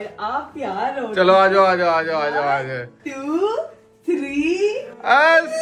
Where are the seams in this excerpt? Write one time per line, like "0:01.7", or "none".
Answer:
none